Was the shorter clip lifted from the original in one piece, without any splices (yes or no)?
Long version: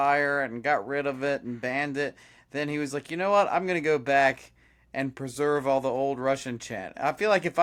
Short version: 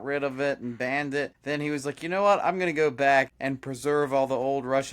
no